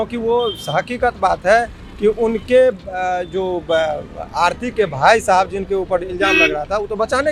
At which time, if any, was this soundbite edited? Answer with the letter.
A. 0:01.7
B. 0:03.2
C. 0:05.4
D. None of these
D